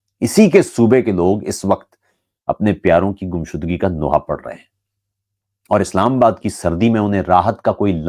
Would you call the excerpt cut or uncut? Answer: uncut